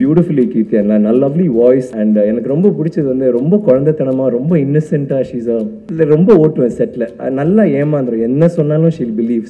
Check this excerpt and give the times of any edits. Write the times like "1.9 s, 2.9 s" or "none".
1.9 s, 5.8 s